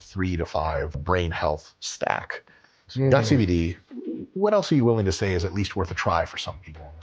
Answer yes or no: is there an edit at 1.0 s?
yes